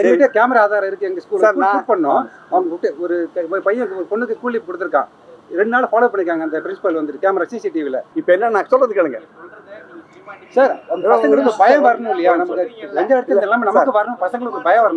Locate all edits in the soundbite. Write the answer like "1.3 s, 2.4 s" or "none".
8.1 s